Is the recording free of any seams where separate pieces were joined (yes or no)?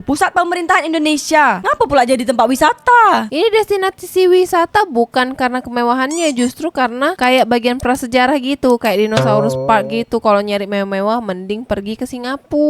no